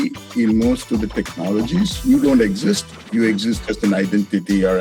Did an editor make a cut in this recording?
no; 0 cuts

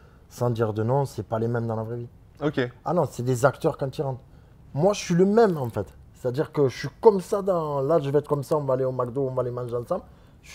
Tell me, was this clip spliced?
no; 0 cuts

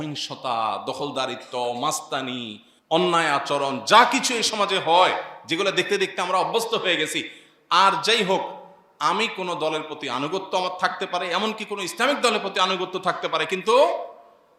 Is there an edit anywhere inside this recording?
no; 0 cuts

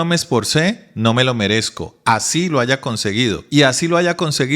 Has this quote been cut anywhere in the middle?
yes; 1 cut; at 3.4 s

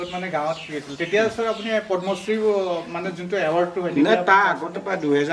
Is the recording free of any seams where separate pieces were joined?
yes; 0 cuts

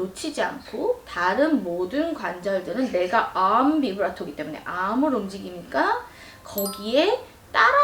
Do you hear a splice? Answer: no; 0 cuts

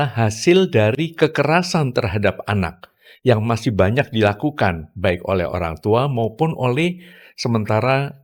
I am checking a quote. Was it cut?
no; 0 cuts

